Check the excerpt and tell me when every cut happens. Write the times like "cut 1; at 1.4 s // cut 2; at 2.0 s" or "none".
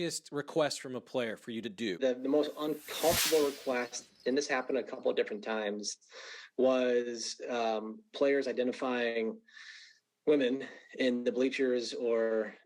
cut 1; at 2.0 s